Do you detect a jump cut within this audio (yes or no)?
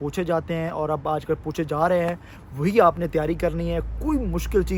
no